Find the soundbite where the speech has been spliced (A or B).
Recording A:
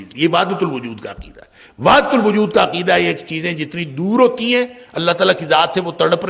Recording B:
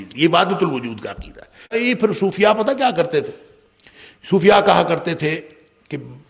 B